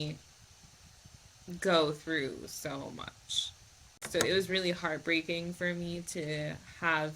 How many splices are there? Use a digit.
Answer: 1